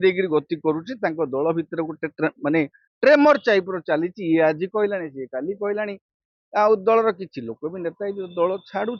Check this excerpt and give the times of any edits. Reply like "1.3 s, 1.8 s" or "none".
none